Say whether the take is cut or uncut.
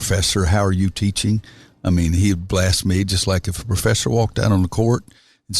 uncut